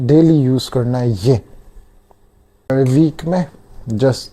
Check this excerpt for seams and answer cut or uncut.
cut